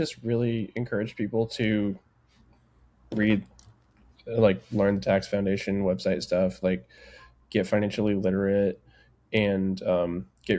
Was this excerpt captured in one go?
yes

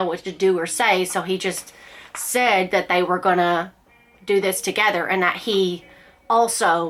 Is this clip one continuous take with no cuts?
yes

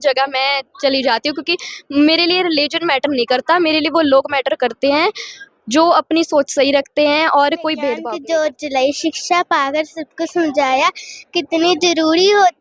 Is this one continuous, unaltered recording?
no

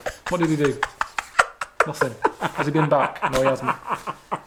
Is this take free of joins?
yes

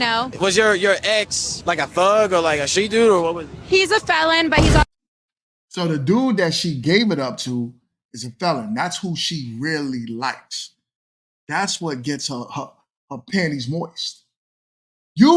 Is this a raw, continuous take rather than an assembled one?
yes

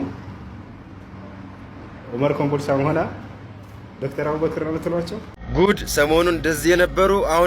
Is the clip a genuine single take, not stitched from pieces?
no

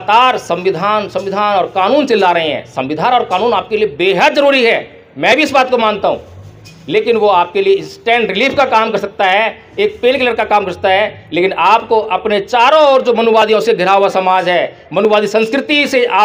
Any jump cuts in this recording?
no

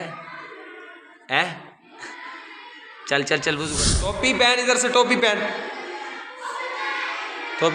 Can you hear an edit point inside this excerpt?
yes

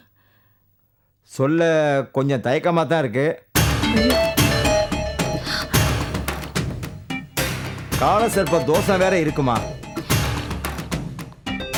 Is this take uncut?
yes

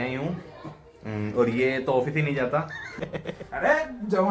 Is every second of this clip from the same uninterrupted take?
no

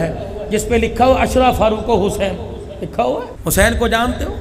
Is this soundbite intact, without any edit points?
no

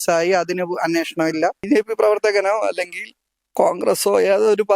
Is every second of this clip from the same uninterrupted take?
no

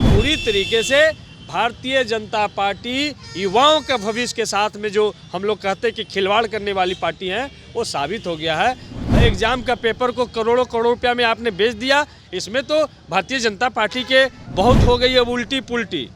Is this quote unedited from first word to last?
no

